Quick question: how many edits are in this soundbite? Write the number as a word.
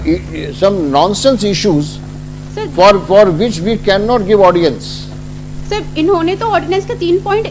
zero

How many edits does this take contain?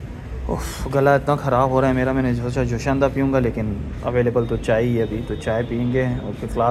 zero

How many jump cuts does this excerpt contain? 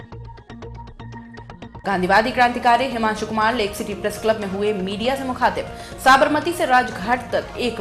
zero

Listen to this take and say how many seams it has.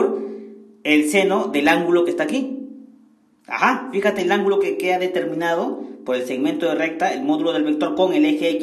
zero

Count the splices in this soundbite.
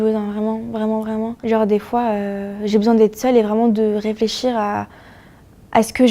one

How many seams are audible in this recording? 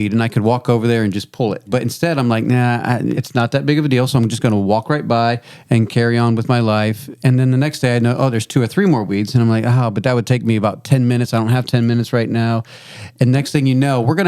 two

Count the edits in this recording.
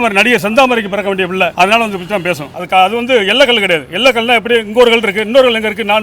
one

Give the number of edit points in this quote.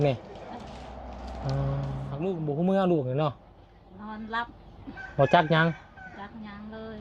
one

